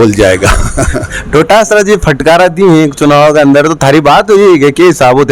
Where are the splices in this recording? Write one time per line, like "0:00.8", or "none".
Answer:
none